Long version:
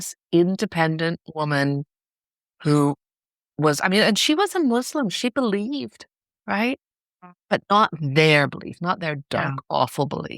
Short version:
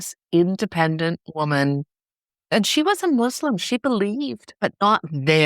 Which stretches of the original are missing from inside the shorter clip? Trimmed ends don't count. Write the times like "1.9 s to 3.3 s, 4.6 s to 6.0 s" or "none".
2.5 s to 4.0 s, 6.0 s to 7.3 s